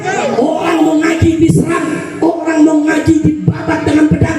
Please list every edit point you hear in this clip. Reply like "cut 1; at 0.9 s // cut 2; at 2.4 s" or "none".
cut 1; at 1.4 s

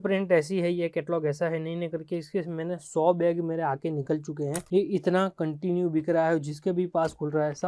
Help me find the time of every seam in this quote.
none

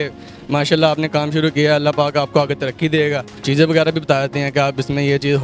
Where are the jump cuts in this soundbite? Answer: cut 1; at 3.4 s

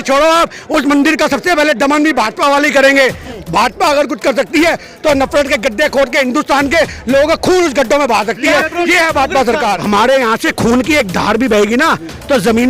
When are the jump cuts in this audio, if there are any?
cut 1; at 3.3 s // cut 2; at 9.8 s

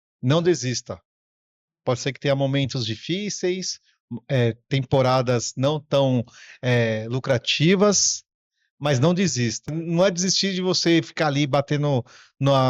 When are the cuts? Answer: cut 1; at 9.8 s

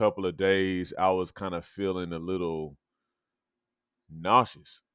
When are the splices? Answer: none

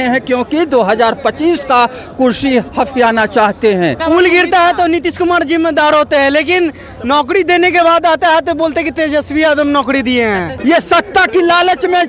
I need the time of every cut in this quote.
cut 1; at 4.0 s // cut 2; at 10.5 s

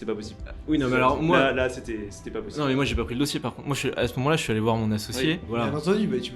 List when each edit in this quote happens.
cut 1; at 5.5 s

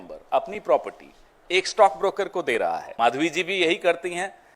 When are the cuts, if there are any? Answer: cut 1; at 2.6 s

